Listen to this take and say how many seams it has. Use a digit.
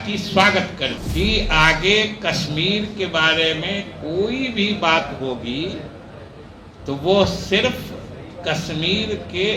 1